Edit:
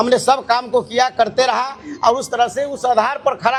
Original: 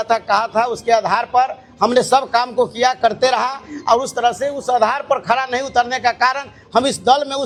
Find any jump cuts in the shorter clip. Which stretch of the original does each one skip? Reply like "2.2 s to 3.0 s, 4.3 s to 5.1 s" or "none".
none